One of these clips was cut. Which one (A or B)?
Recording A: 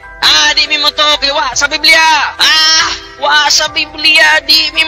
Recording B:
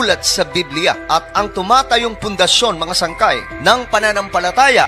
B